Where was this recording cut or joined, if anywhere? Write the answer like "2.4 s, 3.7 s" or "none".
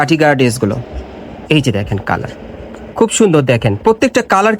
none